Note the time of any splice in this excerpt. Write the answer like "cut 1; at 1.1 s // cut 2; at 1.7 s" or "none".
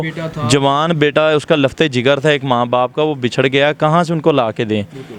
none